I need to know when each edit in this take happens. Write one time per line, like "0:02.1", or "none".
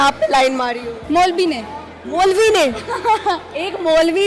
none